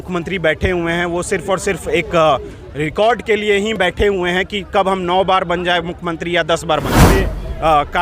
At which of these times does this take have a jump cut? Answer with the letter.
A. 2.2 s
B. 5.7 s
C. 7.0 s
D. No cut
C